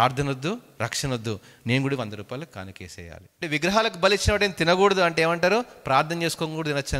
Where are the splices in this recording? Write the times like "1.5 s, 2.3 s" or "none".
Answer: 3.4 s